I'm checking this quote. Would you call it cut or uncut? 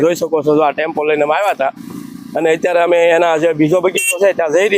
uncut